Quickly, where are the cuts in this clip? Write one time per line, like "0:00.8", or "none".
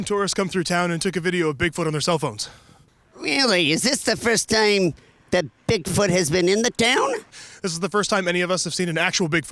0:07.4